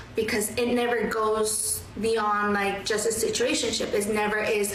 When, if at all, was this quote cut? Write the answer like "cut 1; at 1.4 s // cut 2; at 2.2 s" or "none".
none